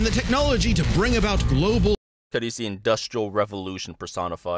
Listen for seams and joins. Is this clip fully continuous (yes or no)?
yes